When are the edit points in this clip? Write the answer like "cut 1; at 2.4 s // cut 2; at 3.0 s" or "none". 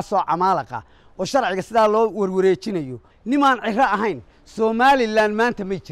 cut 1; at 3.1 s

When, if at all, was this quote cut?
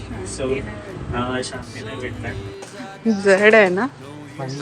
cut 1; at 2.6 s

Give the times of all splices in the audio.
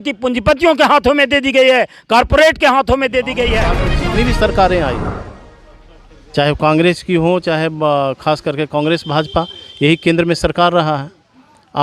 cut 1; at 3.9 s

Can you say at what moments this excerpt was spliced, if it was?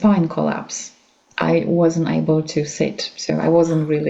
none

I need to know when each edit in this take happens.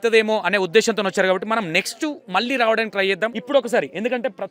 cut 1; at 3.4 s

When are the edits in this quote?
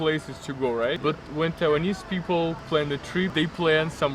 cut 1; at 1.0 s // cut 2; at 2.7 s

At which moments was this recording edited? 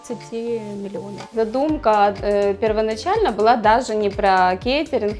cut 1; at 1.2 s

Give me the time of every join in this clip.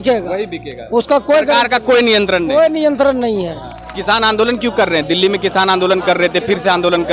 cut 1; at 4.0 s

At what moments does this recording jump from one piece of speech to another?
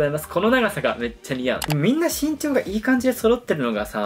cut 1; at 1.7 s

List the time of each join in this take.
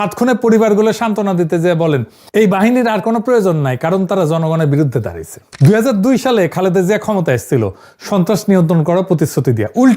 cut 1; at 5.5 s

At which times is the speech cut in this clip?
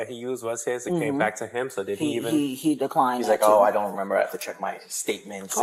none

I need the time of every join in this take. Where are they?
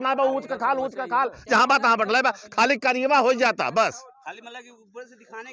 none

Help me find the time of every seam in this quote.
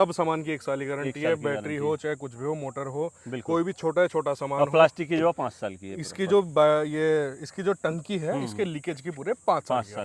none

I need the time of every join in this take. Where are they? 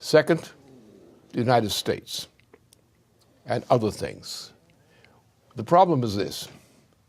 cut 1; at 3.8 s

